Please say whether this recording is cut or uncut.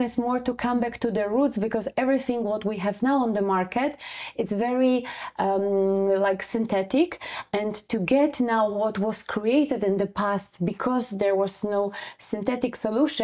uncut